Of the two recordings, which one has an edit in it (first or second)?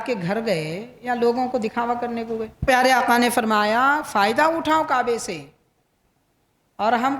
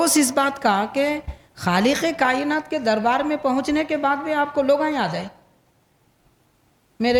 first